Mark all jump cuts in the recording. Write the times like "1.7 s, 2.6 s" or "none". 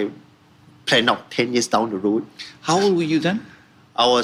none